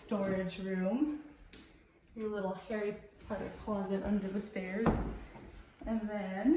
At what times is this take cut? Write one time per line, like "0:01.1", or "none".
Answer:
none